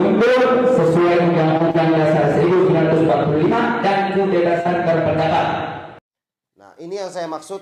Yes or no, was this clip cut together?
yes